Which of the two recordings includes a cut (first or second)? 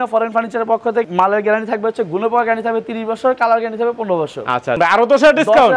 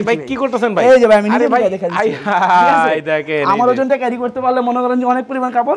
first